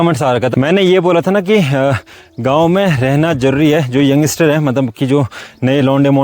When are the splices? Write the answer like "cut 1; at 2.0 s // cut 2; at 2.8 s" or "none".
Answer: none